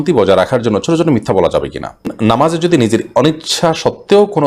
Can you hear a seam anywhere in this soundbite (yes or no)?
yes